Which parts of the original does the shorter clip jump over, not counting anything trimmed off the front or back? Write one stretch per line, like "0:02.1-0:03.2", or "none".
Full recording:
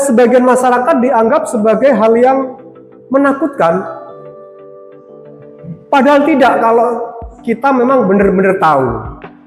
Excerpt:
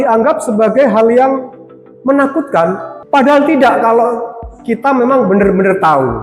0:04.0-0:05.7